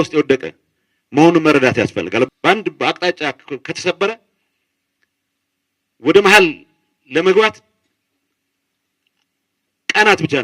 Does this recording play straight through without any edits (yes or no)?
no